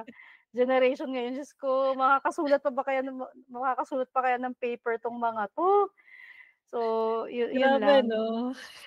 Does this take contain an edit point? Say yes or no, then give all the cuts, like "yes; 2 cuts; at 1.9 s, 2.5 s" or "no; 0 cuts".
no; 0 cuts